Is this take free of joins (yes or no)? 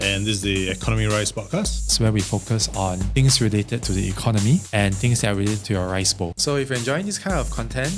yes